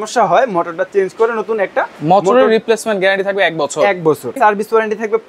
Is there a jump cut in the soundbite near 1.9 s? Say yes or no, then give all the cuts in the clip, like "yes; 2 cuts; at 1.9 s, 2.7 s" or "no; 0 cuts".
no; 1 cut; at 4.4 s